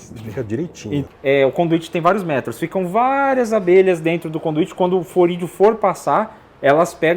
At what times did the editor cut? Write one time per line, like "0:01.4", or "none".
0:01.0